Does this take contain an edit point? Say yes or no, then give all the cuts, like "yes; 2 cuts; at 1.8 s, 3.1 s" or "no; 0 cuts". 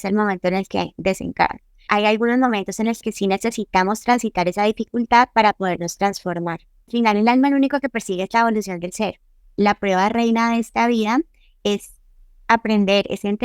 yes; 3 cuts; at 1.8 s, 6.9 s, 9.5 s